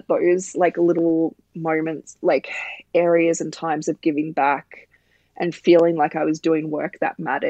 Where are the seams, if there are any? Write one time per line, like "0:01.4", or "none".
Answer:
none

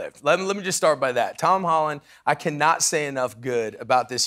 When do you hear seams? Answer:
none

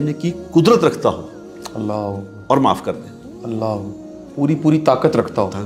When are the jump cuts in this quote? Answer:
none

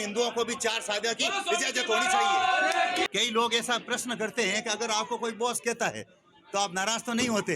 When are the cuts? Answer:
0:03.1

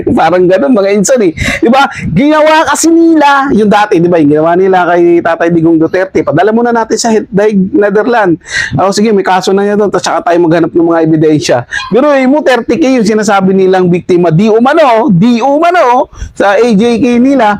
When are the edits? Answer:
none

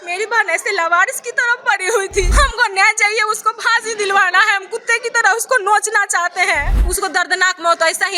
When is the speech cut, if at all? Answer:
0:02.3
0:06.8

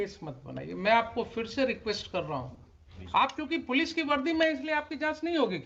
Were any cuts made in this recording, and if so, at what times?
0:02.9

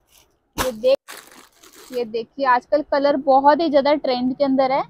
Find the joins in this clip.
0:01.0

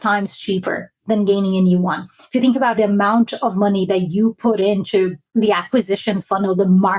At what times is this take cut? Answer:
0:02.7
0:05.2

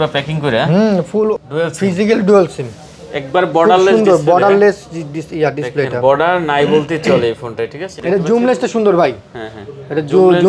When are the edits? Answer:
0:01.5
0:08.0

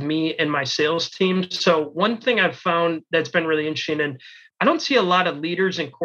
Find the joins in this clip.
0:04.5

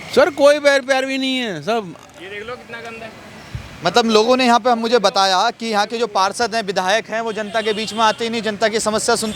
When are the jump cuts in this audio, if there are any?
none

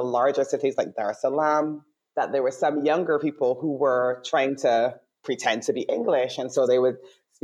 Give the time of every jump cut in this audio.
none

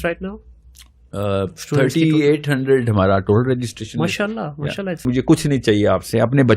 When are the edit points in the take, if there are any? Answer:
0:05.0

